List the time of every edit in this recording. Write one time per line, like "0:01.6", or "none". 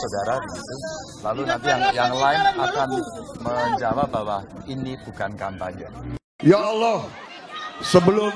0:06.2